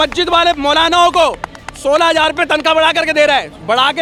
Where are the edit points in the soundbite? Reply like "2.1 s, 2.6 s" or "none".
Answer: none

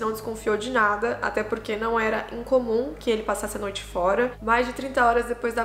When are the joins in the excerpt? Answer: 4.3 s

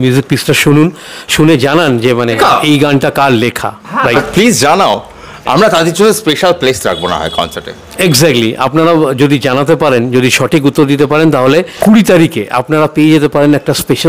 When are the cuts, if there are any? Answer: 2.4 s, 4.2 s, 11.7 s

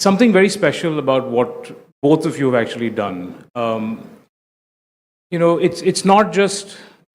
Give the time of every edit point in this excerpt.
2.7 s

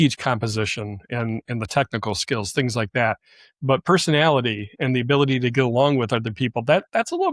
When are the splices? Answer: none

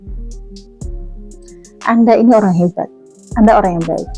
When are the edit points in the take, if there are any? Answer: 1.4 s

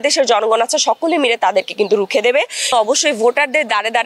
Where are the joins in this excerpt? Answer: 2.7 s

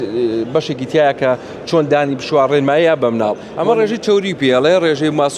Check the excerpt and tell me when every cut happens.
3.5 s

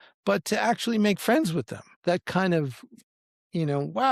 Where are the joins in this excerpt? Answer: 1.9 s, 3.0 s

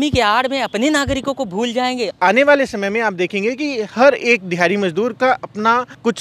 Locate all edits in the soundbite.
2.1 s

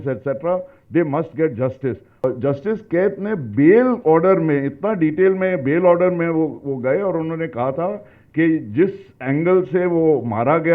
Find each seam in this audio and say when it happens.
2.2 s

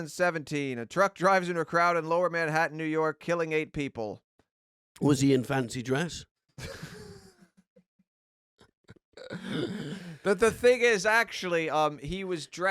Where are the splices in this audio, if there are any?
none

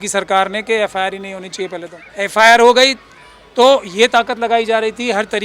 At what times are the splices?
2.0 s

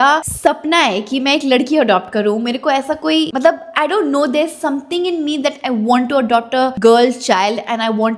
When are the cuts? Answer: none

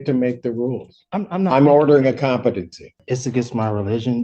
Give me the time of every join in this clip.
3.0 s

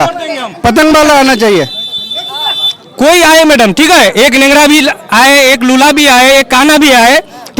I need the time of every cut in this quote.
none

